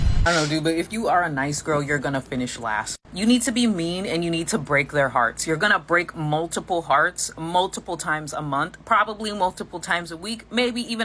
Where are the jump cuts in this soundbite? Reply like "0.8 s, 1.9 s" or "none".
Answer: none